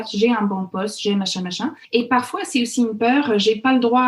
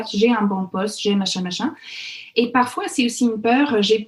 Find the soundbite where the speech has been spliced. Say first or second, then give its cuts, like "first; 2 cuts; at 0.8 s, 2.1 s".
first; 1 cut; at 1.8 s